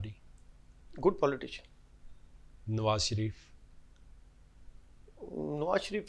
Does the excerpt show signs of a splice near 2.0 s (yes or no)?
no